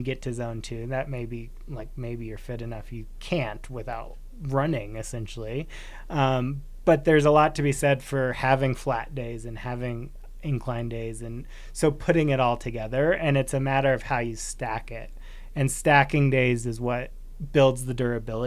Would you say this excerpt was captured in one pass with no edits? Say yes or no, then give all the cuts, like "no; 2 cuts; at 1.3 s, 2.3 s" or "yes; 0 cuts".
yes; 0 cuts